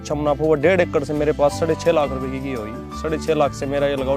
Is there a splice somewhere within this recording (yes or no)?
no